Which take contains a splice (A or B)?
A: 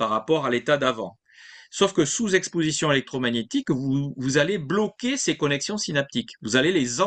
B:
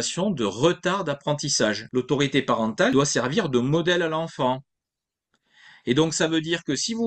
B